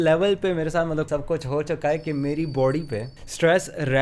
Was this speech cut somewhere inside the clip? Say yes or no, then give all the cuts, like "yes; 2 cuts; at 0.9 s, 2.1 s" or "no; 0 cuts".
yes; 1 cut; at 1.1 s